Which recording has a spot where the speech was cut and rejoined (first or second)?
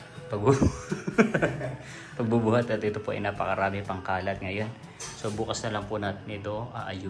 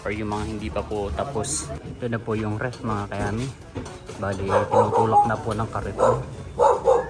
second